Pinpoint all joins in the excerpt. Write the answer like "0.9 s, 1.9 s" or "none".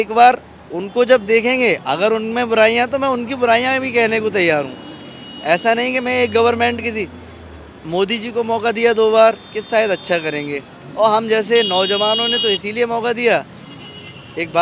none